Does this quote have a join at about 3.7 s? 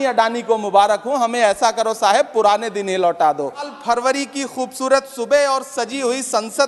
yes; 1 cut; at 3.7 s

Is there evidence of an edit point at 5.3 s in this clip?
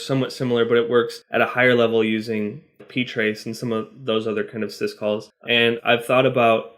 yes; 2 cuts; at 1.2 s, 5.3 s

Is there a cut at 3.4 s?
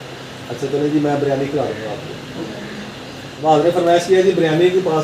yes; 1 cut; at 3.4 s

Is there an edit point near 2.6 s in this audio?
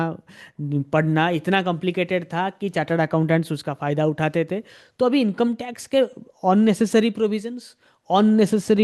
no; 0 cuts

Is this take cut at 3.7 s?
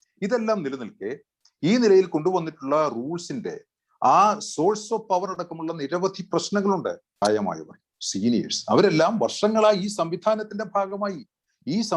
no; 1 cut; at 7.2 s

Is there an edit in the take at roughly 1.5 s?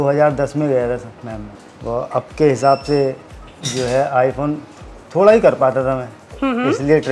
yes; 1 cut; at 1.5 s

